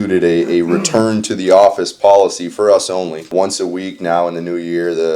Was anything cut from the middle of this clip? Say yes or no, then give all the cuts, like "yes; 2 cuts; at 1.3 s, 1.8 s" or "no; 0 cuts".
yes; 1 cut; at 3.3 s